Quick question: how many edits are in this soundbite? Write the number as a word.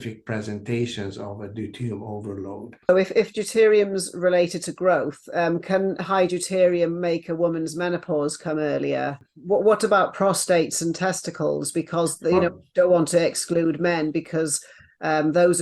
two